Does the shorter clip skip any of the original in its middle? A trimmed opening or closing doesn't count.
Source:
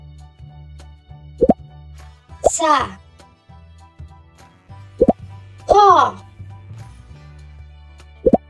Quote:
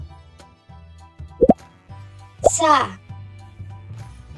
yes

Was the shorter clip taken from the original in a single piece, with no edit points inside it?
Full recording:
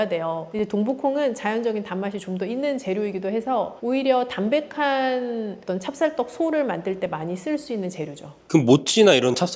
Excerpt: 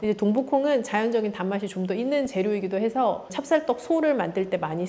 no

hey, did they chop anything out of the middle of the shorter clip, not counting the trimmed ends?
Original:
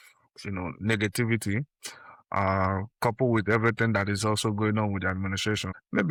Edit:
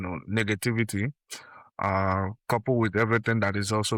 no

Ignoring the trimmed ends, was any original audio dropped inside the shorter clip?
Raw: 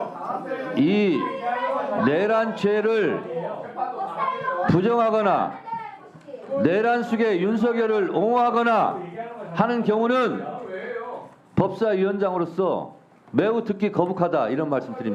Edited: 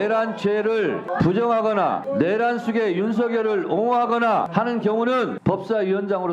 yes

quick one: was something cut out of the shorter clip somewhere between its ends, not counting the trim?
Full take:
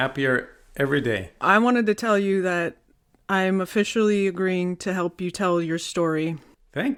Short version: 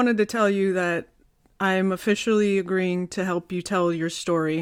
no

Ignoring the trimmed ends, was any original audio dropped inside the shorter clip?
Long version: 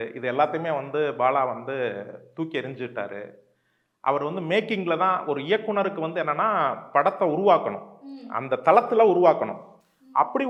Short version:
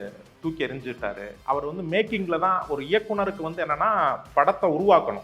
yes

